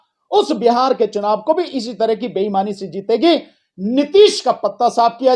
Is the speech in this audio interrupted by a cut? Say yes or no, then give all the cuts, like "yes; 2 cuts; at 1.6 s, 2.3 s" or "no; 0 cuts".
no; 0 cuts